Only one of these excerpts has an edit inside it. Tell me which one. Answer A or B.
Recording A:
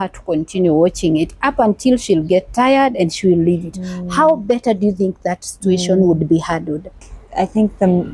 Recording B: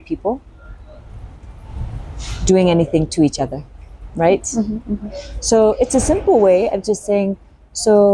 A